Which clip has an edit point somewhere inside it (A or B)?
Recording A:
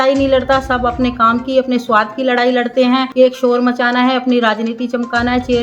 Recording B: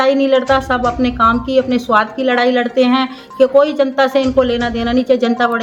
A